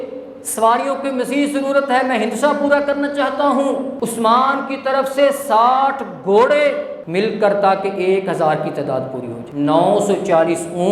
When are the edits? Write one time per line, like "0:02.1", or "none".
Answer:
0:03.9
0:06.9
0:09.4